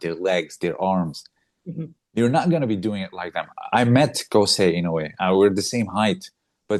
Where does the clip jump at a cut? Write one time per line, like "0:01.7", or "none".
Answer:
none